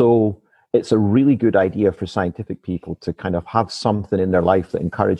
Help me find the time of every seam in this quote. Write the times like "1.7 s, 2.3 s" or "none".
none